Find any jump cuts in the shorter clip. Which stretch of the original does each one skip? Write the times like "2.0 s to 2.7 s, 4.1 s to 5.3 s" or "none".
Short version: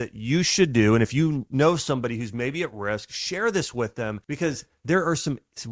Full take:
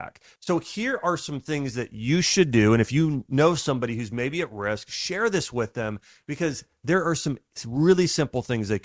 6.0 s to 6.2 s